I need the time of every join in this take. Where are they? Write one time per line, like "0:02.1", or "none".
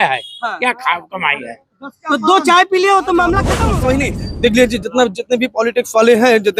0:03.5